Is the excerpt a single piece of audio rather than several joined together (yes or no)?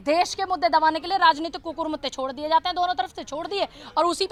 yes